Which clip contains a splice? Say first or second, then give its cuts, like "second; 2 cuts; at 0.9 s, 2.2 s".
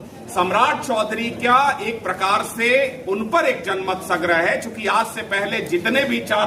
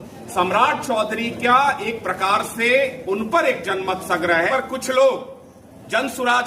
second; 1 cut; at 4.5 s